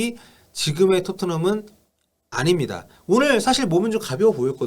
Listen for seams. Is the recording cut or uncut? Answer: cut